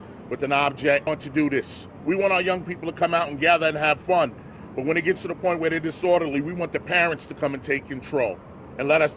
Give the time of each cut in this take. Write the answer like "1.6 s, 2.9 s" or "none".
1.1 s